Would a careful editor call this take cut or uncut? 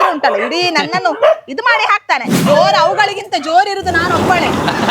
cut